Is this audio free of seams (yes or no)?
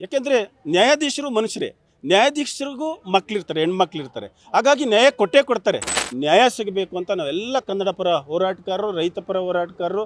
no